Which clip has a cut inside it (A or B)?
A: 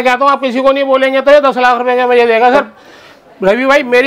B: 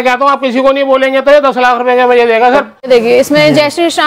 B